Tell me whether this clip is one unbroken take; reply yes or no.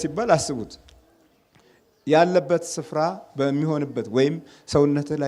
yes